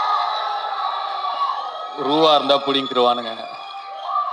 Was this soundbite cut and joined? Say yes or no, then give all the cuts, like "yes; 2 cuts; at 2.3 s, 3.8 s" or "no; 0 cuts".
no; 0 cuts